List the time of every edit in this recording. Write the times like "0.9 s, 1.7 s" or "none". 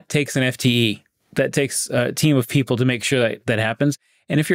none